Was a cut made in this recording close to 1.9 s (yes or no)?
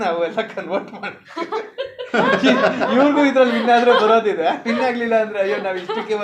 no